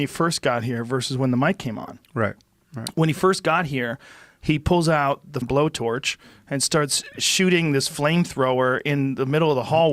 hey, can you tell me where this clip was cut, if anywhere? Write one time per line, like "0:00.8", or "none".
0:05.3